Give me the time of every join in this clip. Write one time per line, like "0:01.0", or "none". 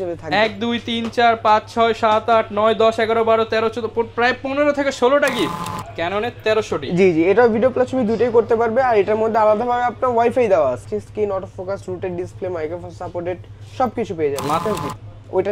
0:05.6
0:10.9
0:14.6